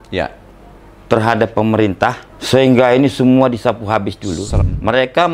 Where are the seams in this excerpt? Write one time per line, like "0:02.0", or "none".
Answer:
0:02.3
0:04.5